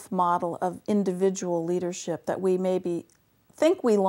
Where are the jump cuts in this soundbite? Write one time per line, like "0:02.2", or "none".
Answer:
none

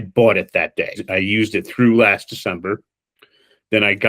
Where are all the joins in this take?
0:01.0

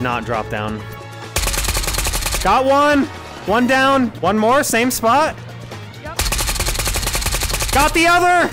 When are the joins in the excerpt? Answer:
0:00.9
0:04.1

